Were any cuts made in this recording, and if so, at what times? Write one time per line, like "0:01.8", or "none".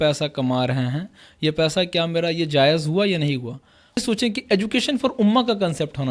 0:04.0